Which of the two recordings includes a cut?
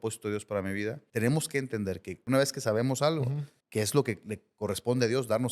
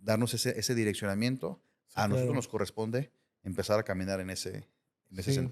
first; 3 cuts; at 1.0 s, 2.3 s, 3.5 s

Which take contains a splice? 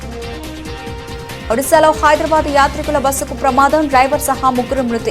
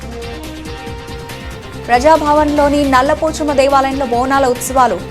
second; 1 cut; at 0.9 s

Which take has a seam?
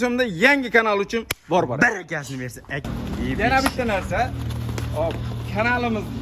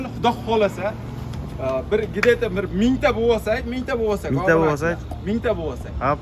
first; 1 cut; at 2.8 s

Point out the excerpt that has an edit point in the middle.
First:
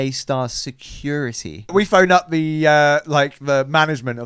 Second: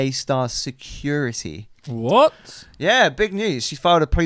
first; 1 cut; at 1.7 s

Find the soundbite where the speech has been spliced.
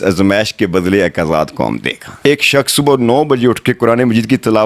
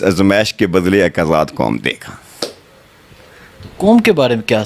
first; 1 cut; at 2.2 s

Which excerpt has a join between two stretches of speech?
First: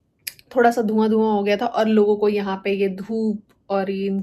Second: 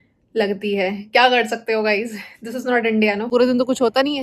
second; 1 cut; at 3.3 s

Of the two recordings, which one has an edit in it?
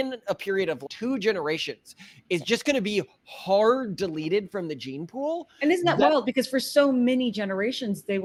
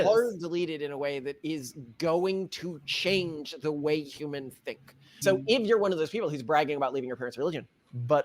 second; 1 cut; at 5.2 s

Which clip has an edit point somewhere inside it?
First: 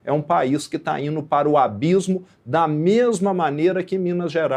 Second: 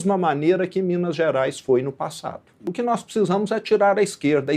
second; 1 cut; at 2.6 s

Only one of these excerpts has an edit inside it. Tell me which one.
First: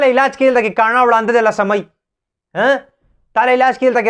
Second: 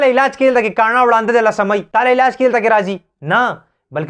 second; 1 cut; at 1.9 s

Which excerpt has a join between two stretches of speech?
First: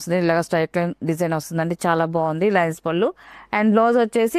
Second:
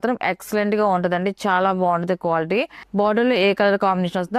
second; 1 cut; at 2.8 s

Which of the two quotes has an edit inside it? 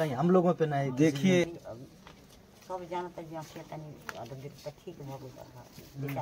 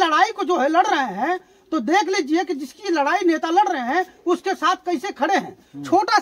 first; 1 cut; at 1.4 s

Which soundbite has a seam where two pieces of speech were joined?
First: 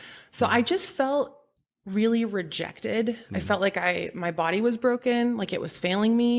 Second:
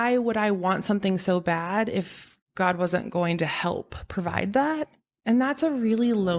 second; 1 cut; at 5.1 s

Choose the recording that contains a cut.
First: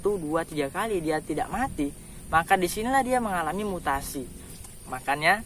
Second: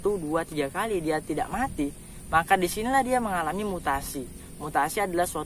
first; 1 cut; at 4.4 s

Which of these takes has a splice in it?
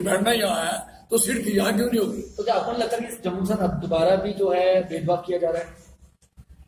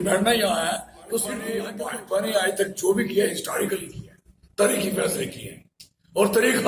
second; 1 cut; at 1.5 s

